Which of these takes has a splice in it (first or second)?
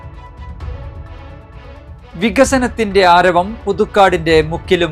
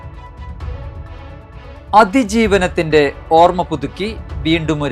second